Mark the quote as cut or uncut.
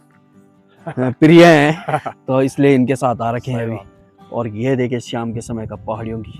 uncut